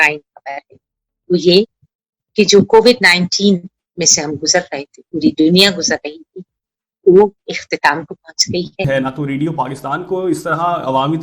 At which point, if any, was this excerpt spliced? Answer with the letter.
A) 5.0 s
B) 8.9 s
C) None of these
B